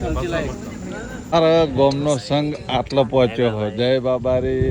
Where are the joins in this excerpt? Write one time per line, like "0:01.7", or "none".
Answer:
0:01.3